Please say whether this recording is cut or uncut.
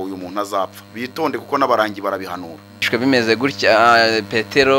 cut